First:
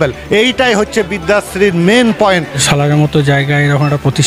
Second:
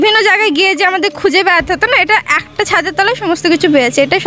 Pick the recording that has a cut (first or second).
first